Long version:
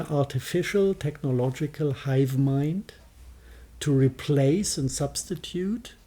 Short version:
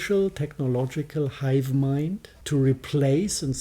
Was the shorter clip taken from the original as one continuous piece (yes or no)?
no